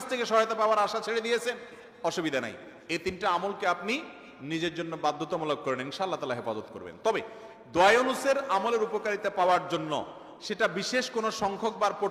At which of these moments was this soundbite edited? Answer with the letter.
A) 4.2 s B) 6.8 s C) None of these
C